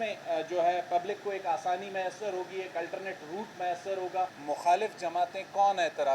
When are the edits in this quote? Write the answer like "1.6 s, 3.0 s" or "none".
4.4 s